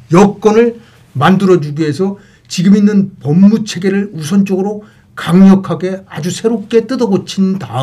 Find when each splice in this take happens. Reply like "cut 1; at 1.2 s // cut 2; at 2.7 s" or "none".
none